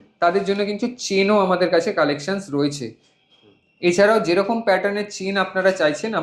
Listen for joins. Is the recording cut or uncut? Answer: uncut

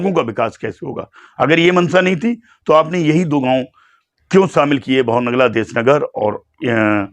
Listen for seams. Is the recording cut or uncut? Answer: uncut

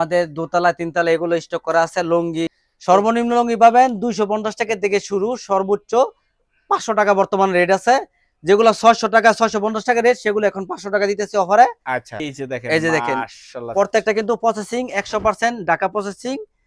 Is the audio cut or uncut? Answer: cut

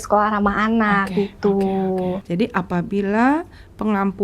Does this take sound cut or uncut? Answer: cut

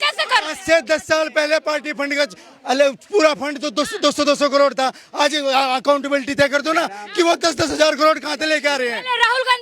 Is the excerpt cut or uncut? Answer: uncut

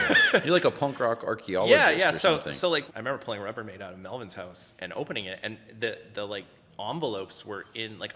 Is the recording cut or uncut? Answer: cut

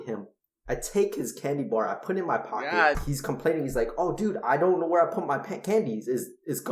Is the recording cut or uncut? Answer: cut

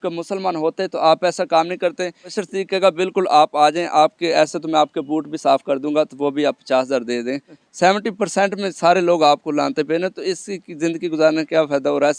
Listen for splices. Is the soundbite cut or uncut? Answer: cut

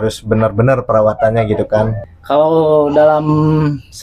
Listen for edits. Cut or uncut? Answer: cut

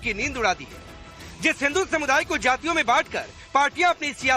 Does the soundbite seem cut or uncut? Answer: uncut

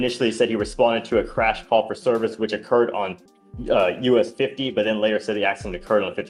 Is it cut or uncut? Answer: uncut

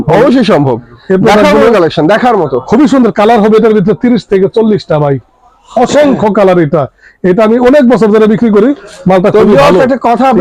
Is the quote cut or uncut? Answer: uncut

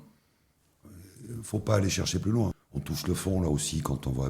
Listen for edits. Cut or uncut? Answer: cut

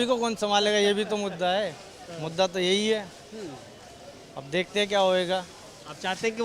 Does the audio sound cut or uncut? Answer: uncut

